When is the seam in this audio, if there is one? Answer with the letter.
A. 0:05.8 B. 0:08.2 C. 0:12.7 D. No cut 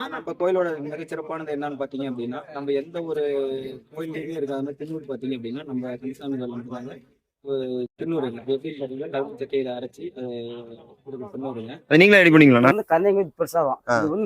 C